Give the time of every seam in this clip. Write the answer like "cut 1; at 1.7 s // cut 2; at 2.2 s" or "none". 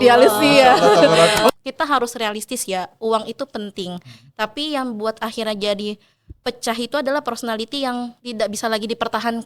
cut 1; at 1.5 s // cut 2; at 8.2 s